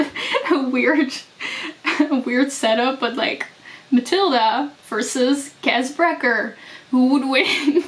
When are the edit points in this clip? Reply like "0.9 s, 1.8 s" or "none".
none